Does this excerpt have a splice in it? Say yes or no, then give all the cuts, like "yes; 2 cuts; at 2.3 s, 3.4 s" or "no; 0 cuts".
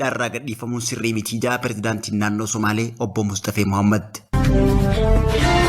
yes; 1 cut; at 4.2 s